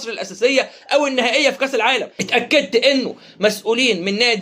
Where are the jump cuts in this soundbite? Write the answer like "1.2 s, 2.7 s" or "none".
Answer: 2.1 s